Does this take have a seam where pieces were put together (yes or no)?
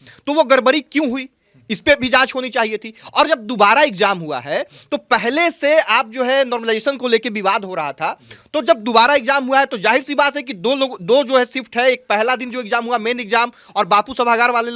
no